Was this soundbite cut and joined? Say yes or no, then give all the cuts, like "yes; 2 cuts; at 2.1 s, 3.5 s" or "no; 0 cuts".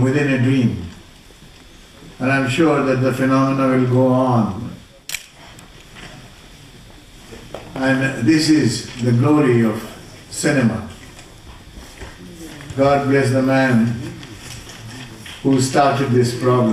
no; 0 cuts